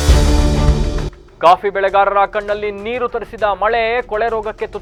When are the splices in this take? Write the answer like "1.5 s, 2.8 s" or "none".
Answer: none